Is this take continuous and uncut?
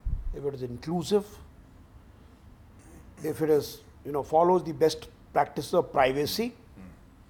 yes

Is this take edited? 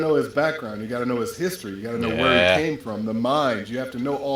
no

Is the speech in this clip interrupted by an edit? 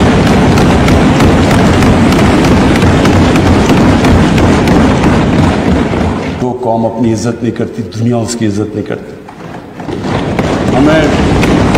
yes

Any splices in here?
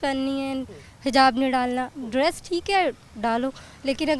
no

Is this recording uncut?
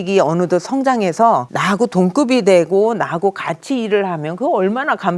no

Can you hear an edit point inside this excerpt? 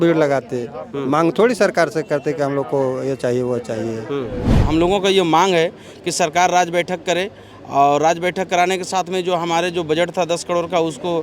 yes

